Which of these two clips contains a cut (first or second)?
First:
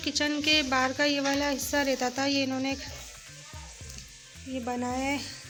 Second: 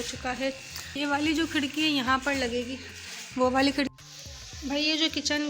second